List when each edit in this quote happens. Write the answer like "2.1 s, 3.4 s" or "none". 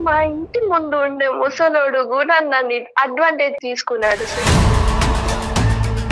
3.6 s

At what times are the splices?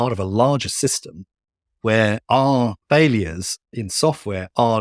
none

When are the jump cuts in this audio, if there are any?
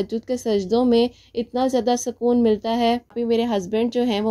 3.1 s

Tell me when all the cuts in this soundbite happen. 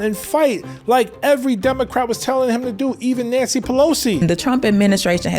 4.2 s

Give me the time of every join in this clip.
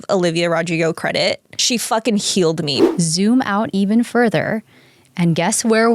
1.5 s, 2.8 s

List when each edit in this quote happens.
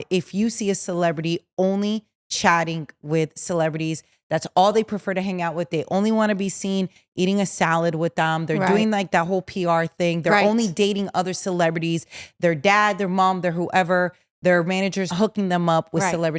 none

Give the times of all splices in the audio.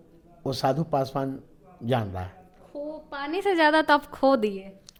none

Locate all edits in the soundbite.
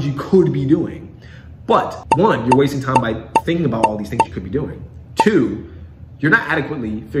2.0 s

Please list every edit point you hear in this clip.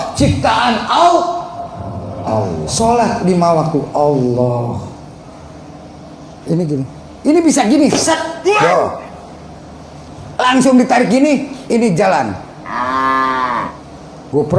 2.6 s

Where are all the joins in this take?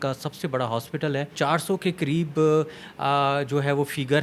1.3 s

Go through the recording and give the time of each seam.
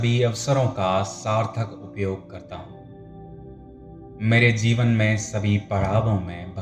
2.4 s, 4.2 s

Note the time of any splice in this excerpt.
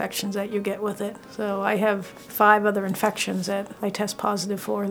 1.2 s, 2.2 s, 3.7 s

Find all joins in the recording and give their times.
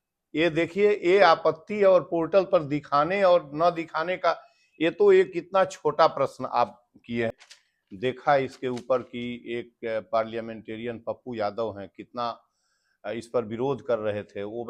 7.3 s

